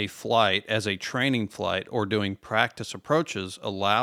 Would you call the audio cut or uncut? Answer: uncut